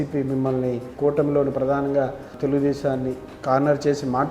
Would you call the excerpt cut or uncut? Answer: cut